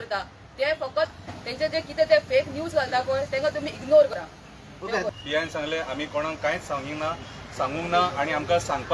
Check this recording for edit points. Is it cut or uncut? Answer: cut